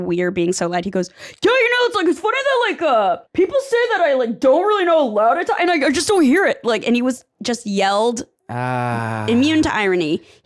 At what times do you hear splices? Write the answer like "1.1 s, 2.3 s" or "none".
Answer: none